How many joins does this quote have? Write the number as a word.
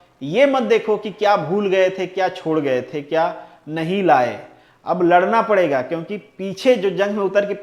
zero